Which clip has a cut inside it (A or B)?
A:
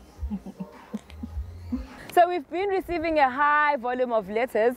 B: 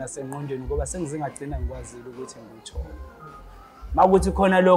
A